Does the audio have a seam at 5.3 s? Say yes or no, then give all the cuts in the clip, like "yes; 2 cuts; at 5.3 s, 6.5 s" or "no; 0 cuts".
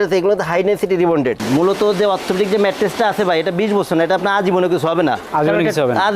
no; 1 cut; at 1.4 s